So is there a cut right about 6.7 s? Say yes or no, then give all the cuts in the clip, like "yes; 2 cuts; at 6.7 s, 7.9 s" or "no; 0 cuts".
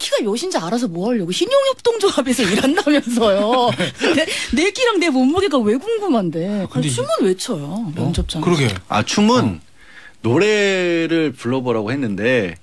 yes; 1 cut; at 6.7 s